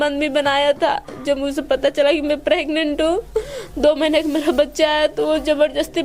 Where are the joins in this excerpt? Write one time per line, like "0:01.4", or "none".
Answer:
none